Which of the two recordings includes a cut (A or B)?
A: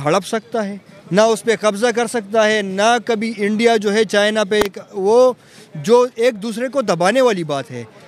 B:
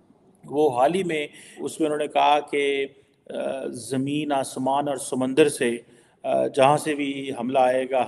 B